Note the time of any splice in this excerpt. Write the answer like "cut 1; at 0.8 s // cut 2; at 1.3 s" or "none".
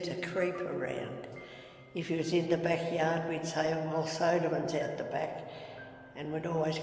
none